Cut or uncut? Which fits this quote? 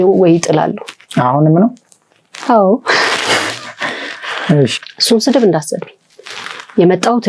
cut